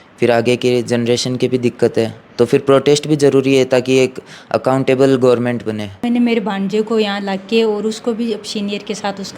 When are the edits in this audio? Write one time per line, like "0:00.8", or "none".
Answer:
0:06.1